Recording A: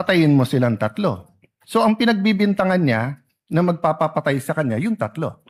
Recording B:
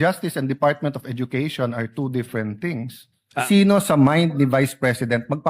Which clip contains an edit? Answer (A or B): B